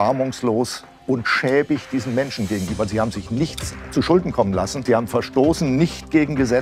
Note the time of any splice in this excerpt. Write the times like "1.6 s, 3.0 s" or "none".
4.8 s